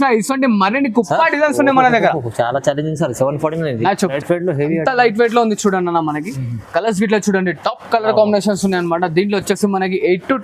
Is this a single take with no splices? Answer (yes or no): no